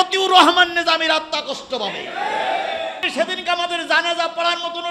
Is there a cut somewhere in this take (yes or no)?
yes